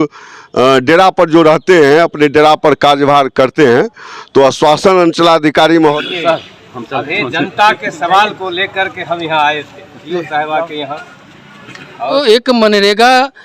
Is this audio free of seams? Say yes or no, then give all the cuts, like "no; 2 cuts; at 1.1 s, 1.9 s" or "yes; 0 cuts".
no; 2 cuts; at 5.9 s, 12.1 s